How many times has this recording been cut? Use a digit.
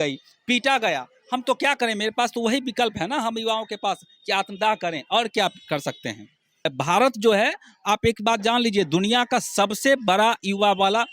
1